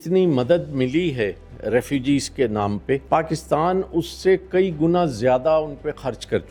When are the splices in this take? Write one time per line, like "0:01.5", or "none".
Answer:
none